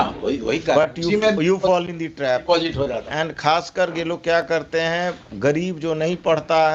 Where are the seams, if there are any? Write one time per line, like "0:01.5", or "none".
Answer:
none